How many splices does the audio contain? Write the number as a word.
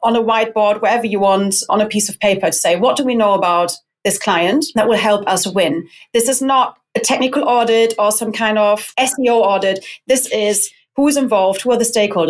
three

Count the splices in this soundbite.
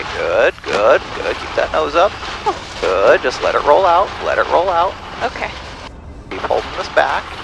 zero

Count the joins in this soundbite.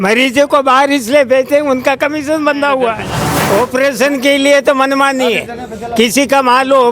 one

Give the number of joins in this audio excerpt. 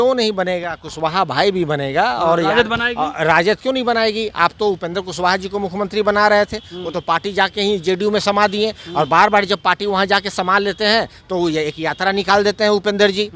one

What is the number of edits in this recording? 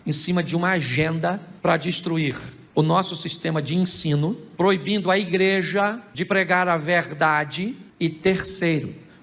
five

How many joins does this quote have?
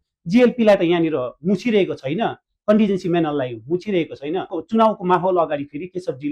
one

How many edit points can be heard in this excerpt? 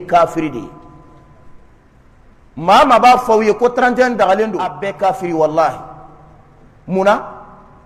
one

